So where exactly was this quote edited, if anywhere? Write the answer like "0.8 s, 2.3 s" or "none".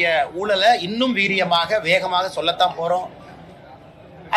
none